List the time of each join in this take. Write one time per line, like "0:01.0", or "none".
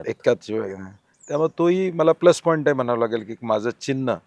none